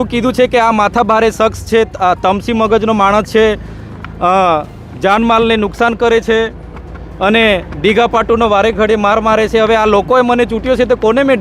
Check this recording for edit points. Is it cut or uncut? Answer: uncut